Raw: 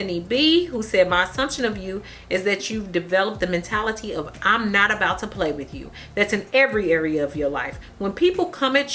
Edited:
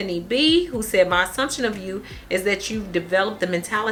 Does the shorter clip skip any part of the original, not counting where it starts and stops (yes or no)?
no